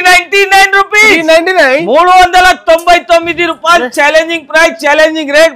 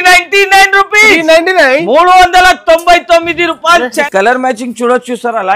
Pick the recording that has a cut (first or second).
second